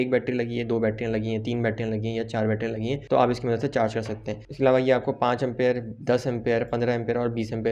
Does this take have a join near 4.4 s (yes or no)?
no